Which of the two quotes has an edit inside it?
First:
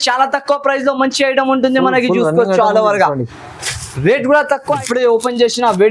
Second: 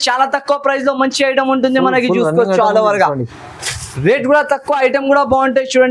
first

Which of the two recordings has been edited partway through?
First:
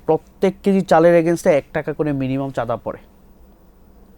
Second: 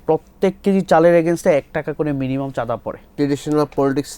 second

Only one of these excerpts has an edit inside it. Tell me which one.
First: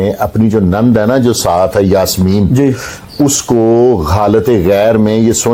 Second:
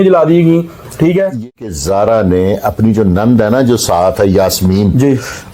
second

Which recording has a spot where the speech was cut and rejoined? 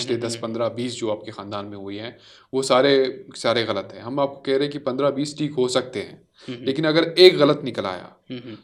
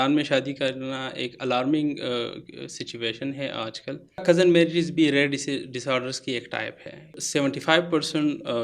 second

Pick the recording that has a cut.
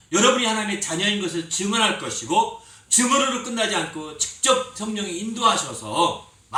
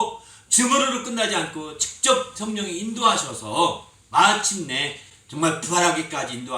second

